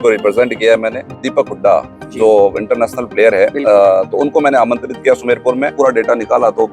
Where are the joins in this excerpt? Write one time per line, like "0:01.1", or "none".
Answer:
0:01.2
0:05.7